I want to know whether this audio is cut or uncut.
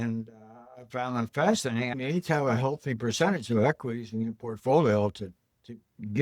cut